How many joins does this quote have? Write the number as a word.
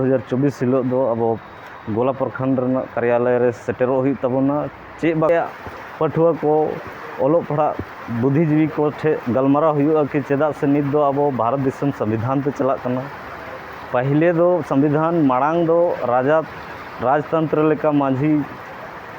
one